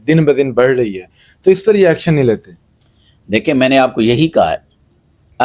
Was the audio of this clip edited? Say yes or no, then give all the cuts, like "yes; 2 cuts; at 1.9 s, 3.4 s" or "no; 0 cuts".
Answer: no; 0 cuts